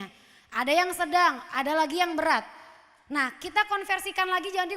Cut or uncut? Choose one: uncut